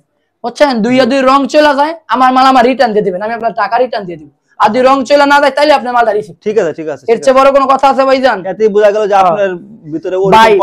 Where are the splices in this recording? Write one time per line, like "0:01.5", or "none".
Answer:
none